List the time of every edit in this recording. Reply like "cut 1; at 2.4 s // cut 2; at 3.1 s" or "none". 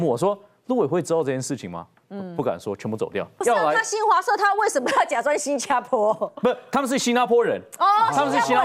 cut 1; at 3.4 s